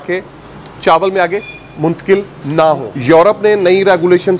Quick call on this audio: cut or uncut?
cut